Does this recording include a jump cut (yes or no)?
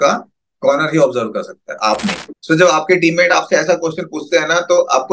yes